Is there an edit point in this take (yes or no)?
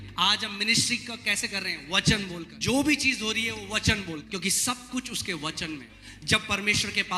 yes